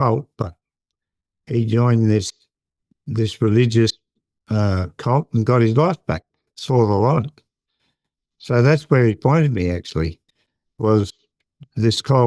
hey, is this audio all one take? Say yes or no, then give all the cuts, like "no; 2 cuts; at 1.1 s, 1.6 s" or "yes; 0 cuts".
yes; 0 cuts